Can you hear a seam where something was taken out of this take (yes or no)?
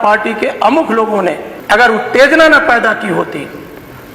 yes